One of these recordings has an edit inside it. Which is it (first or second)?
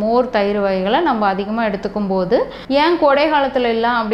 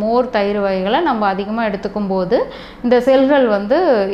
first